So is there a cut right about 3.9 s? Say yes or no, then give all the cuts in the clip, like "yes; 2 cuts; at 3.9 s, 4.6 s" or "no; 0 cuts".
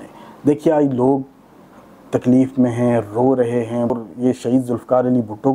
yes; 1 cut; at 3.9 s